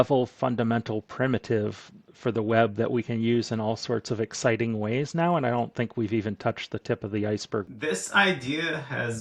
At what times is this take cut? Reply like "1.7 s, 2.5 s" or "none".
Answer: 7.6 s